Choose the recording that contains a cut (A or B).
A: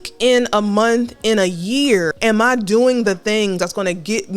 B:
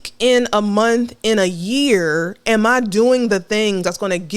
A